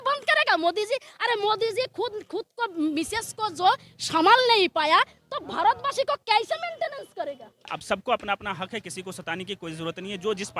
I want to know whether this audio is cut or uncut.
cut